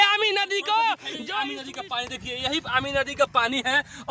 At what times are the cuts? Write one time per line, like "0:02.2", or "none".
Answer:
0:01.6

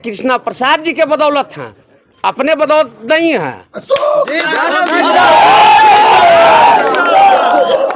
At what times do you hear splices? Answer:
none

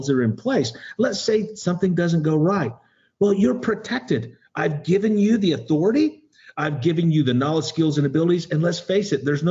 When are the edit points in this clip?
none

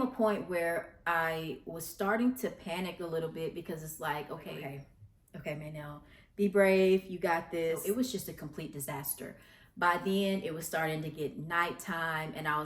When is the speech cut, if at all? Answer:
0:04.6
0:07.8

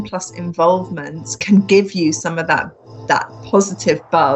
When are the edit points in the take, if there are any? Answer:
0:01.3

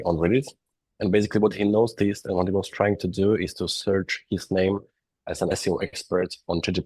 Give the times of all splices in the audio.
0:05.5

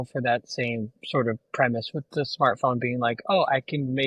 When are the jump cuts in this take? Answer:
none

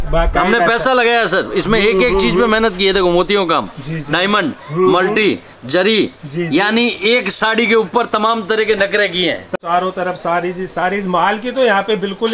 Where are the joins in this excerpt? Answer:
0:09.5

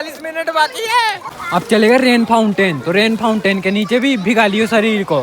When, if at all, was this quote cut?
0:01.3

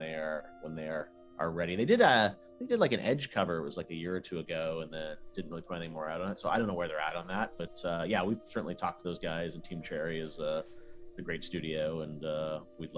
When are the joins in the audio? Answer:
0:06.7

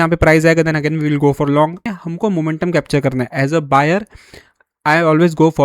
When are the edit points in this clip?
0:01.9

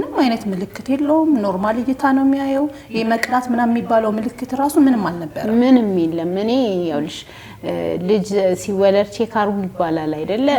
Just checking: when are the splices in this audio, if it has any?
none

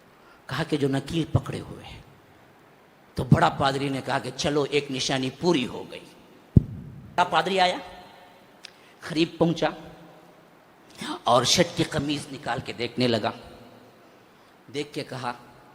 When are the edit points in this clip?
0:07.2

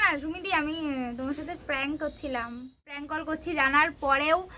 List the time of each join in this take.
0:03.1

